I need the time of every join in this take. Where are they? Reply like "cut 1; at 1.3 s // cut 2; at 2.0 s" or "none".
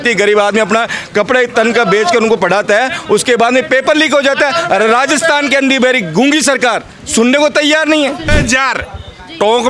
cut 1; at 8.3 s